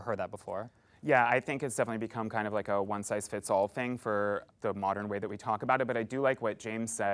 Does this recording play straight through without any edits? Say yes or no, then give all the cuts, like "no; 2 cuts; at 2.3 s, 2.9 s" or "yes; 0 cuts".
no; 1 cut; at 4.4 s